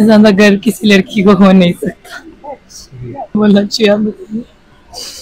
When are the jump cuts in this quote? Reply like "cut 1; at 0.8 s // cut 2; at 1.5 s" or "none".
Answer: cut 1; at 3.4 s